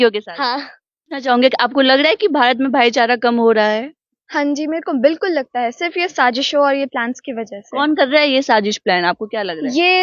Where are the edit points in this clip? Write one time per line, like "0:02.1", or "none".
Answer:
0:01.2